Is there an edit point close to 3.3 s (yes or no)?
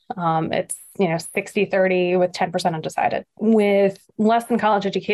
yes